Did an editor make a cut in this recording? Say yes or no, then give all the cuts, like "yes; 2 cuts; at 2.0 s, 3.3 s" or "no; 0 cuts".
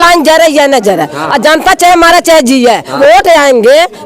yes; 1 cut; at 3.0 s